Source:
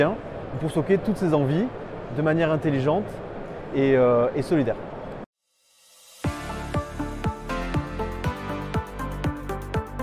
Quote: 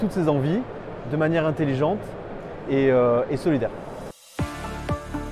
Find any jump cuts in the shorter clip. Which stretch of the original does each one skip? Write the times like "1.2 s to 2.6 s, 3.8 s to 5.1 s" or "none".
5.3 s to 6.1 s